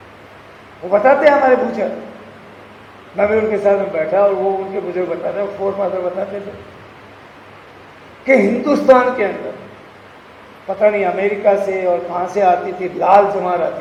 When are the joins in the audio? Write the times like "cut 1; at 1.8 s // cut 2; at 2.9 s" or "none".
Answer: none